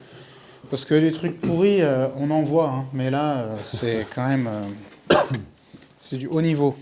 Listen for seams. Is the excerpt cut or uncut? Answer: uncut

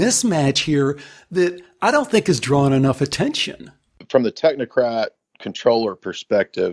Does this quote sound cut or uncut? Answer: cut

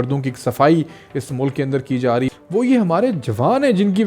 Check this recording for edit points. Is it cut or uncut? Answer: cut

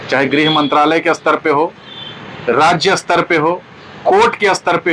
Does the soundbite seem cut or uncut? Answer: uncut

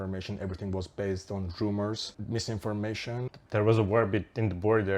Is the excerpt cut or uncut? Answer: cut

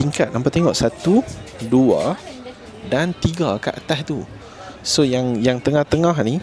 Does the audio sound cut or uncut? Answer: uncut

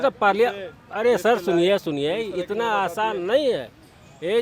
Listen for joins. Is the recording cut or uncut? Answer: uncut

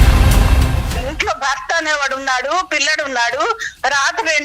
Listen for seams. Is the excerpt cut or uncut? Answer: cut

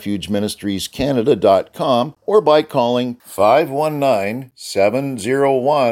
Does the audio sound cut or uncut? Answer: cut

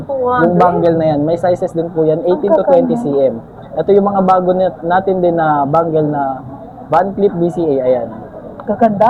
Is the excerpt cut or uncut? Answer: uncut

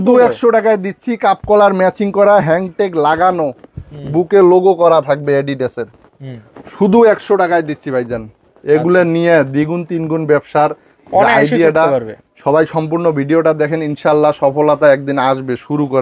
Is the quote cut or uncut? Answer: uncut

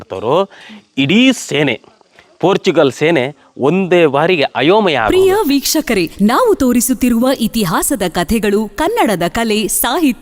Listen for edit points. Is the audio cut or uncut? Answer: uncut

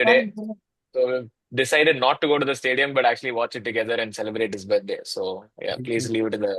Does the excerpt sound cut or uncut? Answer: uncut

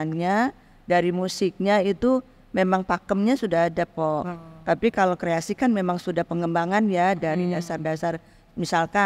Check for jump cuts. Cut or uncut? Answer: uncut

